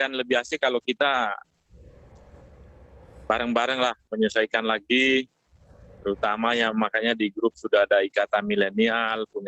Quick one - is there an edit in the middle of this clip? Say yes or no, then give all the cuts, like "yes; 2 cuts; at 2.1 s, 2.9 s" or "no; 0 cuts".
no; 0 cuts